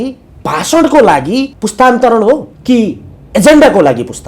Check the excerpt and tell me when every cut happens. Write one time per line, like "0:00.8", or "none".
0:01.6
0:02.5